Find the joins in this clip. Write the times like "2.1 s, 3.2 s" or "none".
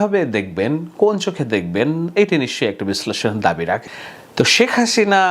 3.8 s